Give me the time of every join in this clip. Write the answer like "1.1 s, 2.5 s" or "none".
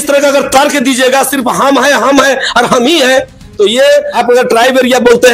4.2 s